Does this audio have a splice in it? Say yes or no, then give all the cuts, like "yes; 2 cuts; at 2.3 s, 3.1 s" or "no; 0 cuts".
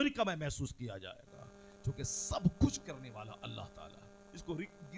no; 0 cuts